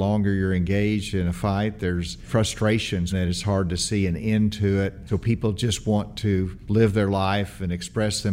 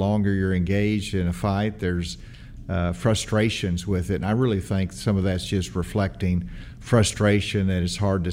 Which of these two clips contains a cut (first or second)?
first